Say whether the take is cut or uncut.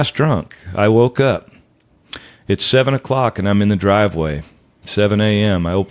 uncut